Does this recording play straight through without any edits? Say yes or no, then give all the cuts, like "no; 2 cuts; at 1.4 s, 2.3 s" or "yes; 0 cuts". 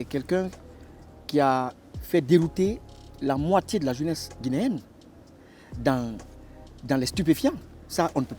yes; 0 cuts